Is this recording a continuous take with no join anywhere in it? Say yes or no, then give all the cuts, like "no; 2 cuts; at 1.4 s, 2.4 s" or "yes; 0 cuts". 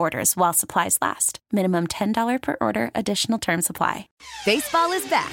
no; 1 cut; at 4.1 s